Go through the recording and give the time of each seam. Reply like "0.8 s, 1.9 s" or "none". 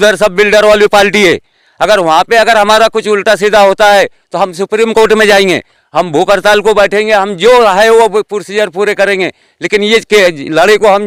none